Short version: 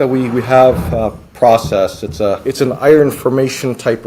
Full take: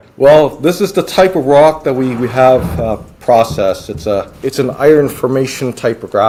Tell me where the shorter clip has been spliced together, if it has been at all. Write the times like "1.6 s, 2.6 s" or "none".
2.4 s